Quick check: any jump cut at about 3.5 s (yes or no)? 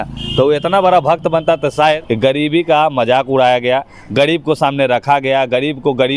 no